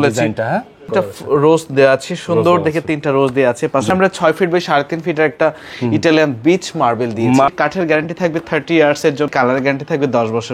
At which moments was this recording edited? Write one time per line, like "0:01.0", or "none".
0:00.9
0:03.9
0:07.5
0:09.3